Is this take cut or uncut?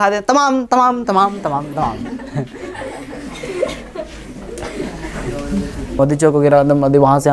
cut